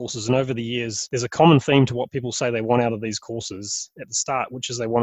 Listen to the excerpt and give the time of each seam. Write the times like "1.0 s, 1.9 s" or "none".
1.0 s